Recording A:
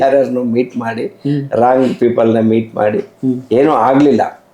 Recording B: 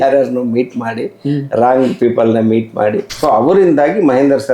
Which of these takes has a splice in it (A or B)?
B